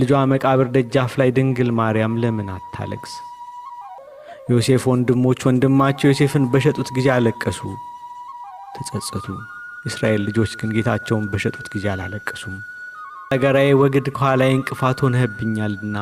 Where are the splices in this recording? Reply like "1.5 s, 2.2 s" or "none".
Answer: 4.0 s, 13.3 s